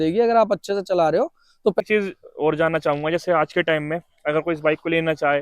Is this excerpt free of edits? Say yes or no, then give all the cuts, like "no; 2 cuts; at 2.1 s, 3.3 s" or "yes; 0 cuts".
no; 1 cut; at 1.8 s